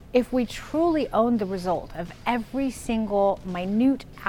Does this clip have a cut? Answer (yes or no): no